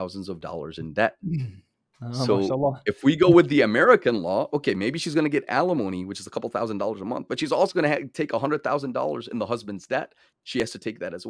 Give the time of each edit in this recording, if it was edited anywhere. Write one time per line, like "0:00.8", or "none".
none